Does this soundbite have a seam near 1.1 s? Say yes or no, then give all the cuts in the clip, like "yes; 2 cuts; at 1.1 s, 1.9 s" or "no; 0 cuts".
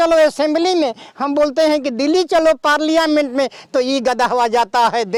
no; 0 cuts